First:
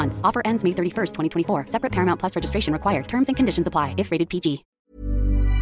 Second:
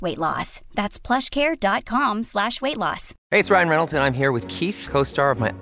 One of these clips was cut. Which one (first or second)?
first